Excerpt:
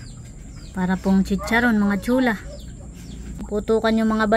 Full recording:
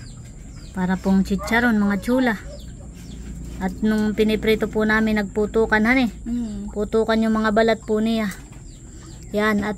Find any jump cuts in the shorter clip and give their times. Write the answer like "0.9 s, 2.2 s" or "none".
3.4 s